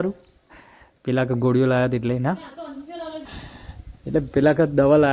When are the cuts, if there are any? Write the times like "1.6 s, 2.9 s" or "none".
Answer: 3.3 s

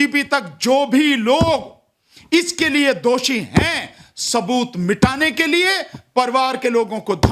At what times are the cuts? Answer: none

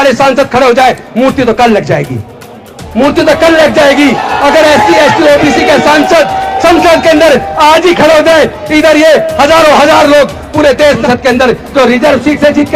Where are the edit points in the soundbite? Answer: 11.0 s

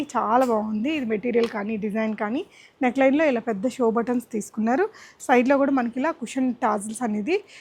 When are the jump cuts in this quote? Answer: none

